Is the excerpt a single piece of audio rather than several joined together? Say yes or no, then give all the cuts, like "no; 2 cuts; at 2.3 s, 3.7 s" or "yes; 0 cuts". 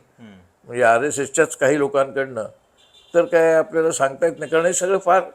yes; 0 cuts